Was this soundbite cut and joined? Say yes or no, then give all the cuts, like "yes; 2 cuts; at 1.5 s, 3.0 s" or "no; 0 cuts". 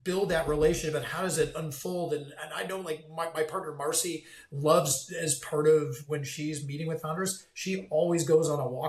no; 0 cuts